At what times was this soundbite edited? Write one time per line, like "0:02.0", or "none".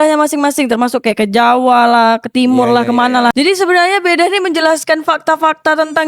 0:03.3